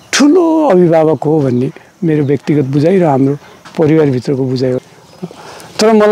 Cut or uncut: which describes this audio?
cut